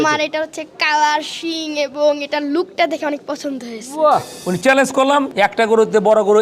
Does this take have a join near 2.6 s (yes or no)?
no